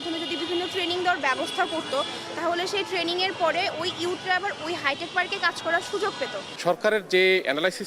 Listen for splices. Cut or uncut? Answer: cut